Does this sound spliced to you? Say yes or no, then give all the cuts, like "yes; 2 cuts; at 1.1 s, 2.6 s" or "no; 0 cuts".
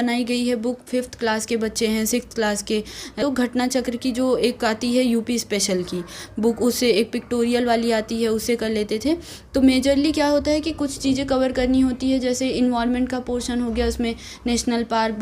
yes; 1 cut; at 3.2 s